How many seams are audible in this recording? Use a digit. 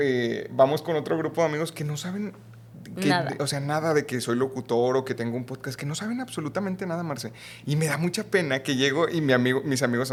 0